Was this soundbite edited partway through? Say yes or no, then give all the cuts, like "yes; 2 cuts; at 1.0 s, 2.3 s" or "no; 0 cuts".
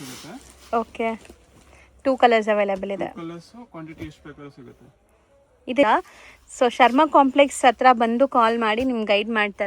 yes; 1 cut; at 5.8 s